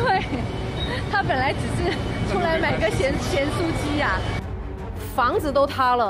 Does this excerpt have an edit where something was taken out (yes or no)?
no